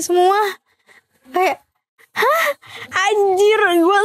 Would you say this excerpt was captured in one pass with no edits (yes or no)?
no